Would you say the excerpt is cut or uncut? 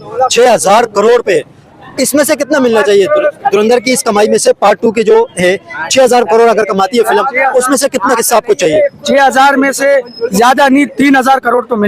uncut